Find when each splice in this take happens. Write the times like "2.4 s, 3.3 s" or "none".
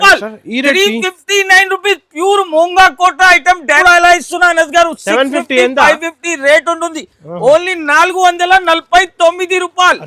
3.8 s